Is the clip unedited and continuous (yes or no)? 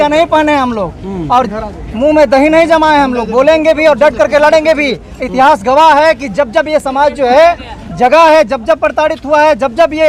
yes